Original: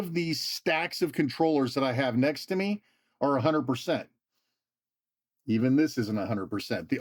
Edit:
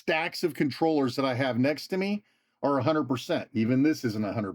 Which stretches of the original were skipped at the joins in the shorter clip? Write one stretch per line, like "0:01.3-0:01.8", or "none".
0:04.1-0:05.4